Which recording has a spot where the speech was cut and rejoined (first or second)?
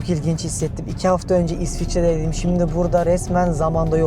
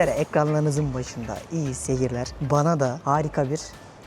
second